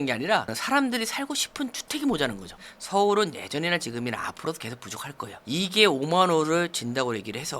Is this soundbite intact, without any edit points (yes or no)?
no